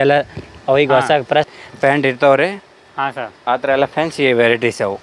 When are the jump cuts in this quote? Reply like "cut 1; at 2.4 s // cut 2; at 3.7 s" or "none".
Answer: cut 1; at 1.5 s